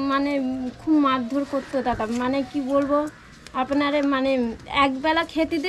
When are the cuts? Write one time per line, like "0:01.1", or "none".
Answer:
none